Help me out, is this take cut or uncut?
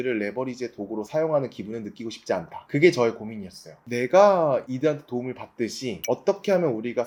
uncut